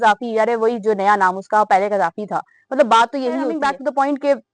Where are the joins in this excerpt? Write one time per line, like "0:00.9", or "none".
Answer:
0:03.5